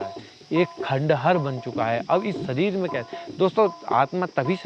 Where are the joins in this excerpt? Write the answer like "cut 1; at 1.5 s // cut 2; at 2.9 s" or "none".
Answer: none

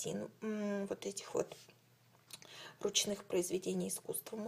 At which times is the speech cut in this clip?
cut 1; at 3.0 s

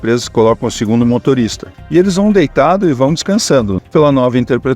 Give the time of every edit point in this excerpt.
cut 1; at 1.7 s // cut 2; at 3.7 s

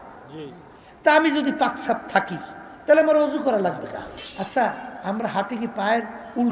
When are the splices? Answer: cut 1; at 4.2 s

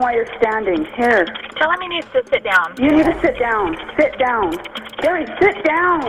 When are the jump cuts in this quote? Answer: none

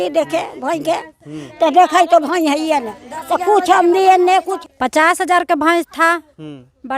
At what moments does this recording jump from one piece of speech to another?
cut 1; at 4.5 s

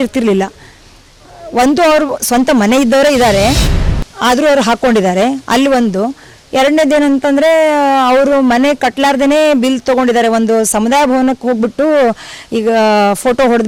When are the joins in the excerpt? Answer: none

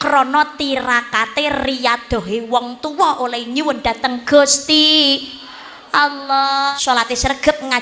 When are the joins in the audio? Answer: cut 1; at 6.7 s

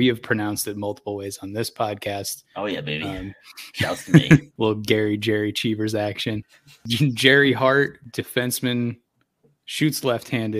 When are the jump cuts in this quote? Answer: cut 1; at 4.5 s // cut 2; at 6.8 s // cut 3; at 8.0 s

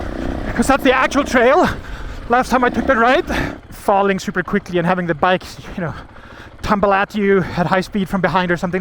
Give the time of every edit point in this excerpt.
cut 1; at 3.5 s

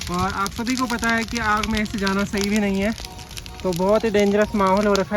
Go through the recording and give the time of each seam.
none

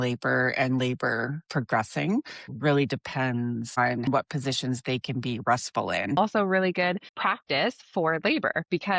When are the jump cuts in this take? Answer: cut 1; at 2.5 s // cut 2; at 4.0 s // cut 3; at 6.2 s // cut 4; at 7.1 s

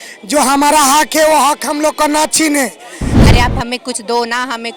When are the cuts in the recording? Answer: cut 1; at 3.3 s

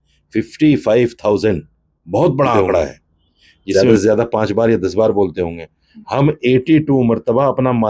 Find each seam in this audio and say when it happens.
cut 1; at 3.7 s

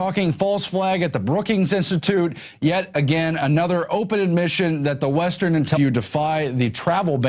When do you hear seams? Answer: none

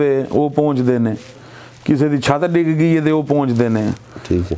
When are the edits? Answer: none

